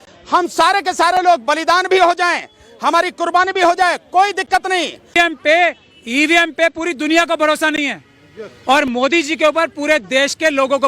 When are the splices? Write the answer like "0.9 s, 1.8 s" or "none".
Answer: 5.2 s